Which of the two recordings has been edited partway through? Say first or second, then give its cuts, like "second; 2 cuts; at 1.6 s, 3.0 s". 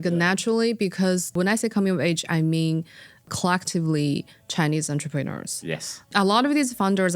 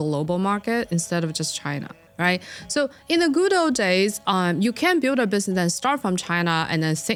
first; 3 cuts; at 1.3 s, 3.3 s, 6.1 s